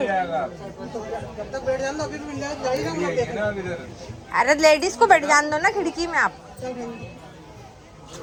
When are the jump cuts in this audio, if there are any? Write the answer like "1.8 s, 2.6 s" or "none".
none

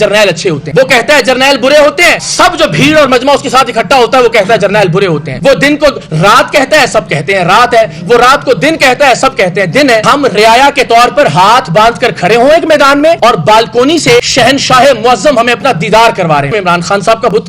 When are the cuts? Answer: 10.0 s, 16.5 s

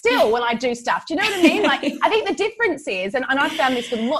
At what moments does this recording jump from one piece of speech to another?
none

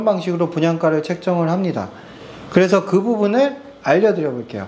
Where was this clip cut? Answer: none

